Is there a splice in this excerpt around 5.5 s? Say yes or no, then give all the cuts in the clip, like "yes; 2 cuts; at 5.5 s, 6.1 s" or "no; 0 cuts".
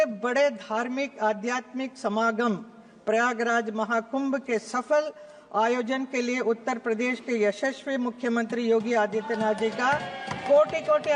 no; 0 cuts